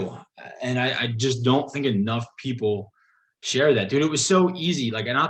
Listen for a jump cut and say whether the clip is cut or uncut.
uncut